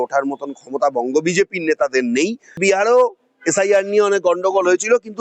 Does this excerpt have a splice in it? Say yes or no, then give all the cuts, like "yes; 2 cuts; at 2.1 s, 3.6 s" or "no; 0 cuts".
yes; 1 cut; at 2.6 s